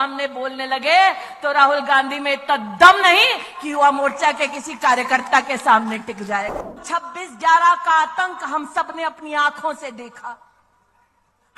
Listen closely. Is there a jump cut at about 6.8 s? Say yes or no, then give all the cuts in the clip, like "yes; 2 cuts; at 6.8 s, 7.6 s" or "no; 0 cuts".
yes; 1 cut; at 6.8 s